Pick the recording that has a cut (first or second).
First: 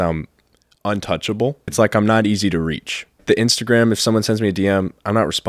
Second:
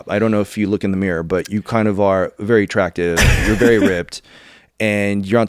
first